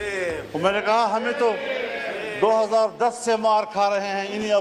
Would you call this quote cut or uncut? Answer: uncut